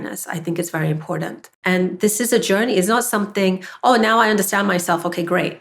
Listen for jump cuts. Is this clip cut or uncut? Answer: cut